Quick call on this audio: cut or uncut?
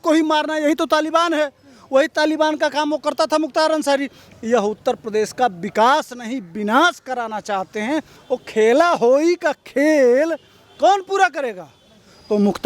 cut